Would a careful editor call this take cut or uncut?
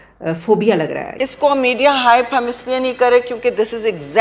cut